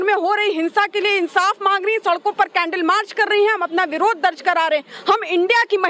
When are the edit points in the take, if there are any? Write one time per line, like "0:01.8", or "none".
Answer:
none